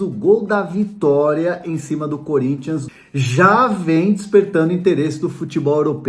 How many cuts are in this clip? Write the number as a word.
one